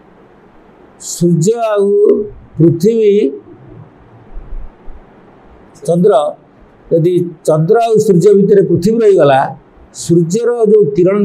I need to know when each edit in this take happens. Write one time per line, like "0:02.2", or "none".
none